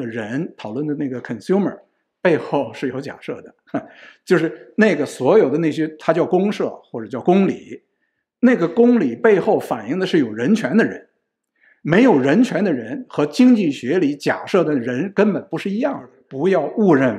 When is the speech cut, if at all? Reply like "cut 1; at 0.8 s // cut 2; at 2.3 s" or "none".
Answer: cut 1; at 16.2 s